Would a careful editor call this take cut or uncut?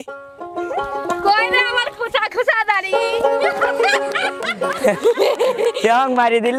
uncut